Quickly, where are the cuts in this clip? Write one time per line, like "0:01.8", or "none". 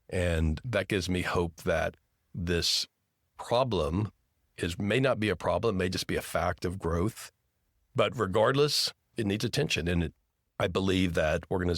0:07.7